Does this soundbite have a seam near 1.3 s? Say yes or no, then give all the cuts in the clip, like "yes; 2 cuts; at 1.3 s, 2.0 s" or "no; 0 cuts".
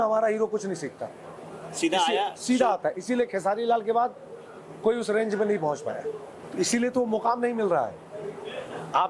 no; 0 cuts